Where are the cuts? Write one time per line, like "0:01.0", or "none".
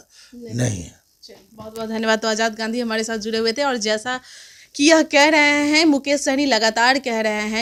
none